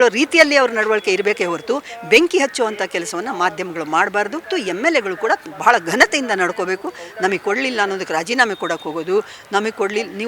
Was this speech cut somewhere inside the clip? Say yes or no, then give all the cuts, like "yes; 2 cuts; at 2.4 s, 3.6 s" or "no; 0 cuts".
yes; 1 cut; at 4.5 s